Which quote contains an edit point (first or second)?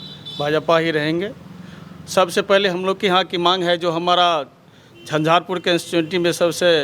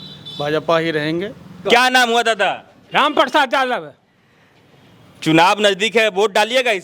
second